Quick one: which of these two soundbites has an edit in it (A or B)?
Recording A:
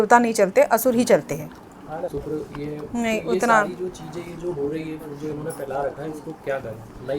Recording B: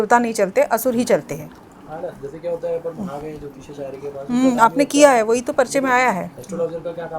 A